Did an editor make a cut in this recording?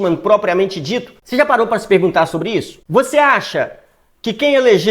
yes; 2 cuts; at 1.2 s, 2.8 s

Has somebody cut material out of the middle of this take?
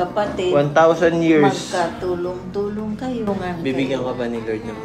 yes; 1 cut; at 3.3 s

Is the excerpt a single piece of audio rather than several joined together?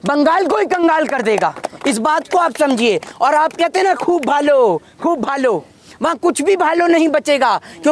yes; 0 cuts

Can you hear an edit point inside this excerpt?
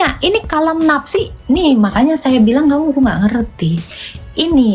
no; 0 cuts

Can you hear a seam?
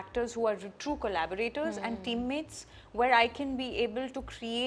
no; 0 cuts

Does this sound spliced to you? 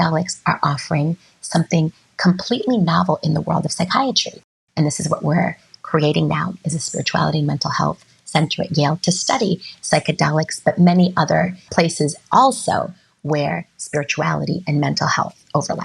yes; 2 cuts; at 4.5 s, 11.7 s

